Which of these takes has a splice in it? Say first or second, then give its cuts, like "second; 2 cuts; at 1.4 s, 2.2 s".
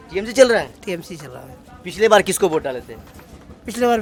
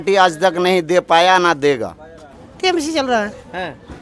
second; 1 cut; at 2.3 s